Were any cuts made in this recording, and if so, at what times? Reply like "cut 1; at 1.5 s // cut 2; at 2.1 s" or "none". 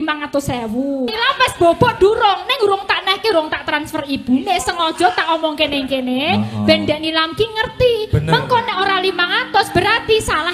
cut 1; at 1.1 s